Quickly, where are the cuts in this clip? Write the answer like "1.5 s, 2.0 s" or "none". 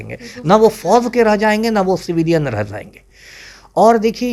none